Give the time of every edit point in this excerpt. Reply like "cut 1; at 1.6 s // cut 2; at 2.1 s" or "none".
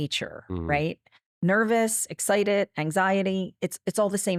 none

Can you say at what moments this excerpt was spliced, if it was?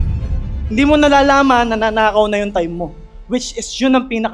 none

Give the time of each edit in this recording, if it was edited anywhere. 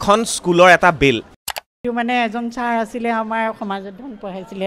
cut 1; at 1.3 s

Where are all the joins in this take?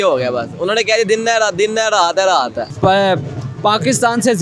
cut 1; at 2.6 s

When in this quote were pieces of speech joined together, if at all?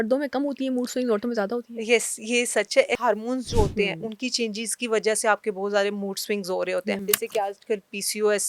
cut 1; at 3.0 s // cut 2; at 7.0 s

